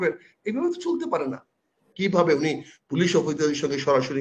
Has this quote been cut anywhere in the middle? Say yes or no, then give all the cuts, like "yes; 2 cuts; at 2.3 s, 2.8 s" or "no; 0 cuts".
yes; 1 cut; at 1.9 s